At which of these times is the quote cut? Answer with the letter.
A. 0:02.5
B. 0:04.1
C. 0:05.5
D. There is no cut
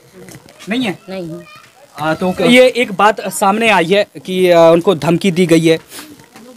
A